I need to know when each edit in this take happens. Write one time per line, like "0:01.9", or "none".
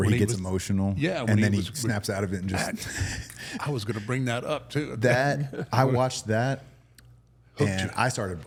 none